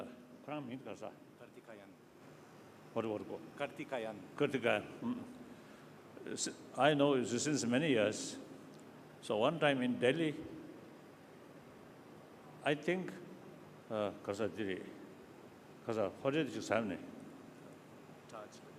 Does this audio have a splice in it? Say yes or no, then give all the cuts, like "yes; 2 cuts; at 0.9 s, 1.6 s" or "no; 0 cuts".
no; 0 cuts